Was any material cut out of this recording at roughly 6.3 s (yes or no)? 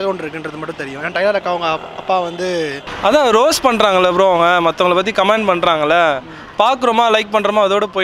no